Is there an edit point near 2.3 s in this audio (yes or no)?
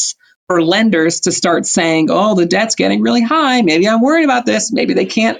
no